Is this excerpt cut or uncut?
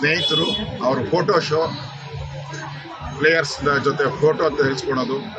uncut